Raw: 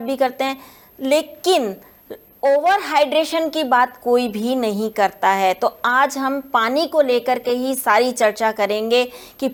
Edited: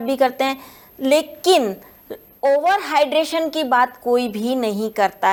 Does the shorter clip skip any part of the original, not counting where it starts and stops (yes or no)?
no